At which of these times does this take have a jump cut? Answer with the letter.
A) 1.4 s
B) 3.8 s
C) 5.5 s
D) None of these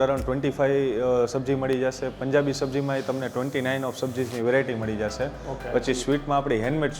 C